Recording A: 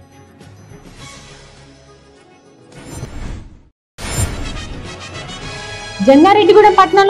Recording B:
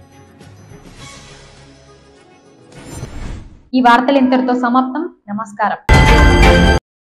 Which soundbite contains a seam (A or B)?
A